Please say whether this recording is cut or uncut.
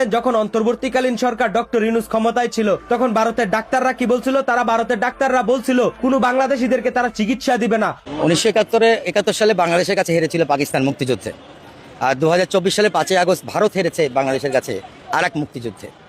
cut